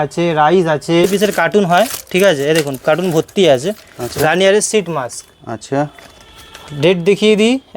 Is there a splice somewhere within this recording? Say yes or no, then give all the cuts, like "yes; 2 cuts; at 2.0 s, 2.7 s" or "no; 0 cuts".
yes; 1 cut; at 1.1 s